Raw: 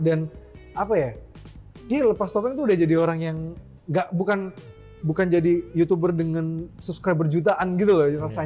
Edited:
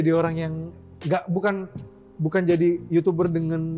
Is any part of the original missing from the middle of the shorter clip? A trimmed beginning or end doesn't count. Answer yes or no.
no